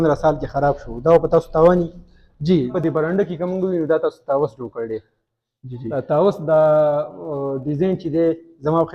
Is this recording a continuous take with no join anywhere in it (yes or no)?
no